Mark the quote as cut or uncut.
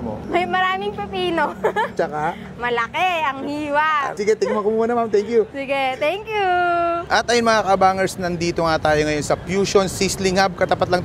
uncut